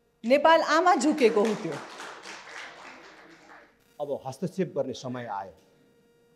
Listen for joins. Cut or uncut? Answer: cut